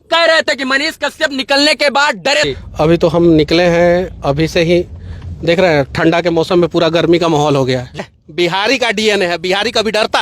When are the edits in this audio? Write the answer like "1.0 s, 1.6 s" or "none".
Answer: 2.5 s, 8.0 s